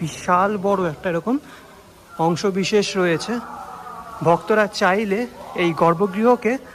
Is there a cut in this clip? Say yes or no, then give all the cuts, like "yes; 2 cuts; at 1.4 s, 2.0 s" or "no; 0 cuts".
no; 0 cuts